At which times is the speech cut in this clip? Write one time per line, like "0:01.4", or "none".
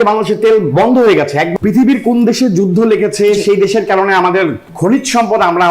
0:01.5